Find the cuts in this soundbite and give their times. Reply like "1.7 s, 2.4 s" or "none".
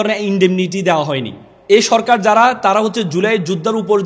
1.5 s